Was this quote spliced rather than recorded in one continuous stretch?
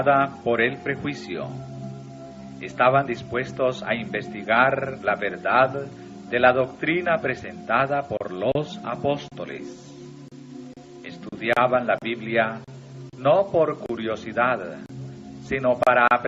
no; 0 cuts

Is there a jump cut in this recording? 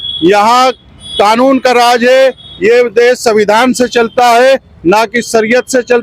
no; 0 cuts

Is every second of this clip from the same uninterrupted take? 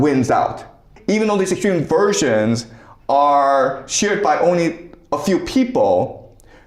no; 1 cut; at 0.9 s

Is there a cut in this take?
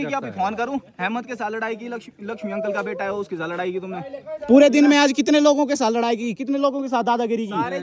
no; 0 cuts

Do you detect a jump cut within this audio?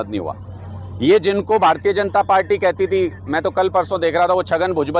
no; 0 cuts

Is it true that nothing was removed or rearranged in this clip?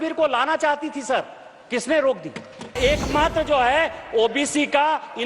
no; 1 cut; at 2.8 s

